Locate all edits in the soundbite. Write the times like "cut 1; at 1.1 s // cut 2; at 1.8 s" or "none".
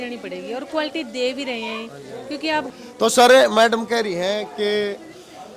cut 1; at 2.7 s